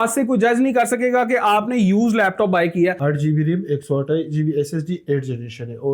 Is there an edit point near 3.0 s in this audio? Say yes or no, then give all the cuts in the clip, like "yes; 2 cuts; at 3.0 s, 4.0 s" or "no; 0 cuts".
no; 0 cuts